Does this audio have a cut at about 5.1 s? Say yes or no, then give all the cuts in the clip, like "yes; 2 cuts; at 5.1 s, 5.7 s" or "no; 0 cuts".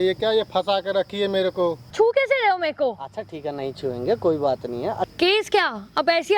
yes; 2 cuts; at 1.8 s, 5.1 s